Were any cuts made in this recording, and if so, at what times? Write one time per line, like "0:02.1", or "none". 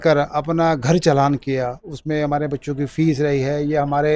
none